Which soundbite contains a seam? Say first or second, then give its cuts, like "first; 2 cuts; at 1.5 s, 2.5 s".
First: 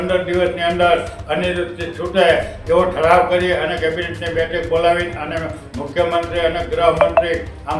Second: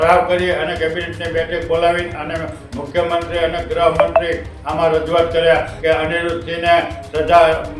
second; 1 cut; at 5.7 s